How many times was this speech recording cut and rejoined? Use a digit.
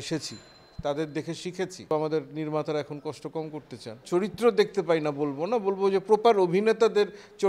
2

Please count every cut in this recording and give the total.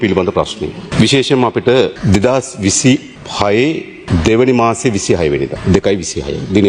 5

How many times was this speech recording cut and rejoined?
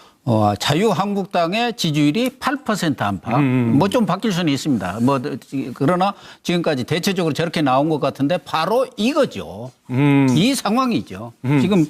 1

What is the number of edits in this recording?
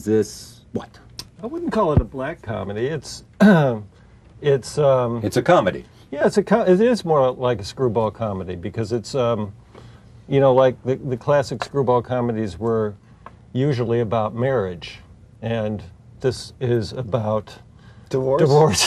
0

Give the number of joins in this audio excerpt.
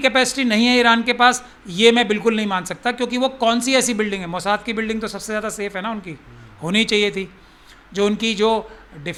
0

